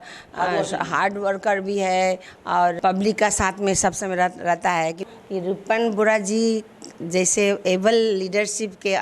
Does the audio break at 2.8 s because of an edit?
yes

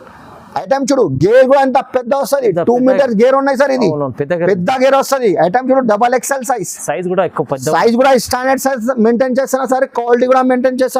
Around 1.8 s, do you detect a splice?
no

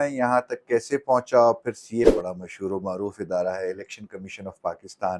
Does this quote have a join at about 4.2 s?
no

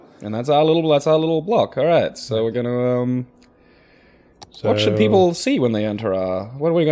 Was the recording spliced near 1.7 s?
no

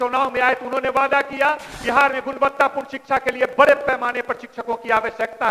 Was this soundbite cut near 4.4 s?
no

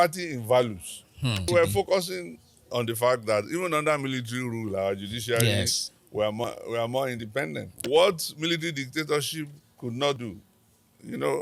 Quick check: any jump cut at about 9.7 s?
no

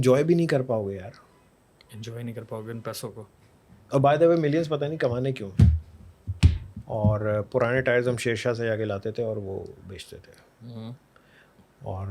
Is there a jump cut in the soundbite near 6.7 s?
yes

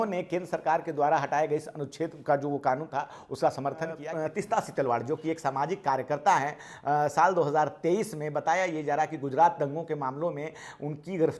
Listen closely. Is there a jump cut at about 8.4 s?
no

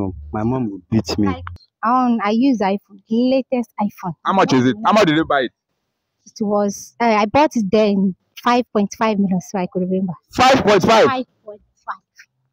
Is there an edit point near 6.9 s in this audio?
no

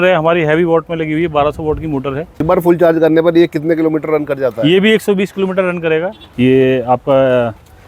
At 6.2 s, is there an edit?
yes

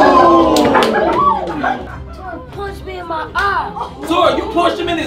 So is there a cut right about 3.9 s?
no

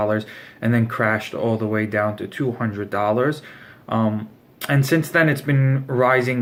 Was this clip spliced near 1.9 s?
no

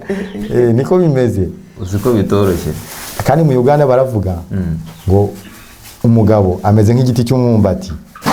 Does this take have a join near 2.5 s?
no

